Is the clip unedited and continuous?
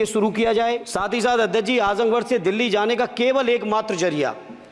no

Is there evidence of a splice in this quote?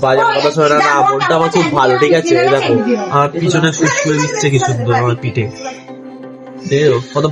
no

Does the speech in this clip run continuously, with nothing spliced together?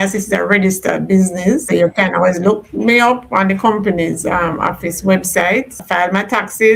no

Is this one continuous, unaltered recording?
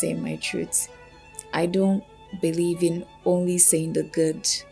yes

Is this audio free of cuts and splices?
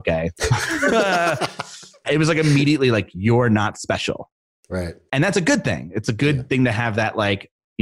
no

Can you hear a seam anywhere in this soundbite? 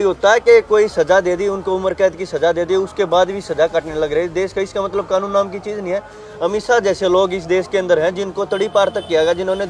no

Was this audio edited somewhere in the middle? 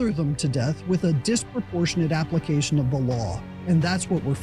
no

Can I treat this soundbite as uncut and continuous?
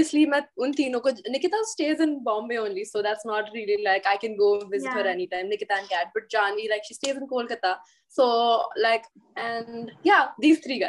no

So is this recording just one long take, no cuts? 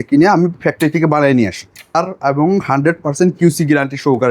no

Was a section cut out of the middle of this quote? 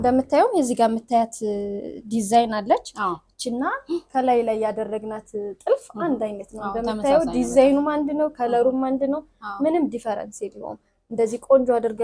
no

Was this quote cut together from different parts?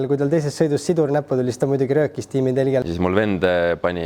yes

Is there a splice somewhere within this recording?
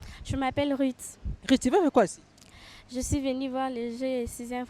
no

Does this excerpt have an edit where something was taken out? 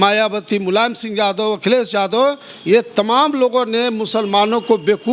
no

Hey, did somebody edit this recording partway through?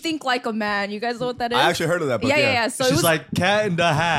no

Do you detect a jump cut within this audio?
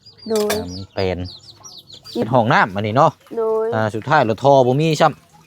yes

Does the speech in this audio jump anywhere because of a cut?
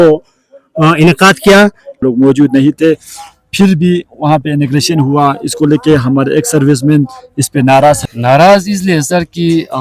yes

